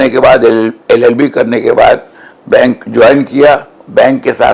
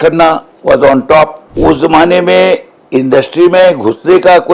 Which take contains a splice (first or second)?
second